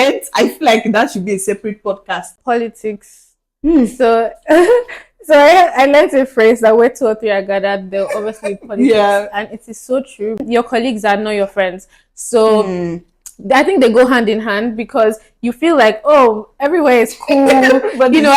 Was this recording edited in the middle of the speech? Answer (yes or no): yes